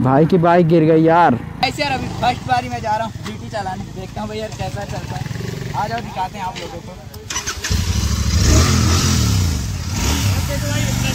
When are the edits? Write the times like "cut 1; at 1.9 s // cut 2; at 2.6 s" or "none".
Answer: cut 1; at 1.6 s